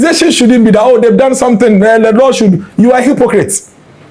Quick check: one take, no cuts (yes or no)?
yes